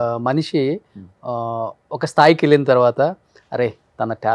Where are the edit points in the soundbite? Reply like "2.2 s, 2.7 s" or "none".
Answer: none